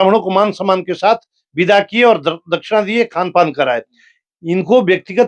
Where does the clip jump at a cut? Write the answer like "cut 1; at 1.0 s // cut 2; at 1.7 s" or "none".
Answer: none